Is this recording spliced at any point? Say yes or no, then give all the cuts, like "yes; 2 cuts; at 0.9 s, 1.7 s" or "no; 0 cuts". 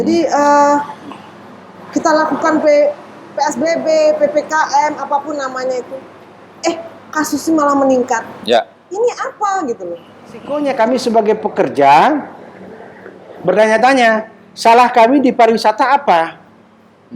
yes; 1 cut; at 10.5 s